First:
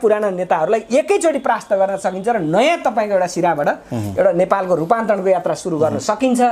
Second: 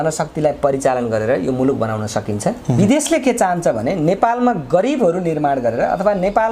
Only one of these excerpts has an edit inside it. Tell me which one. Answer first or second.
second